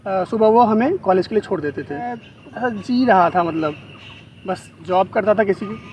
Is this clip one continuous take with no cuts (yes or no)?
no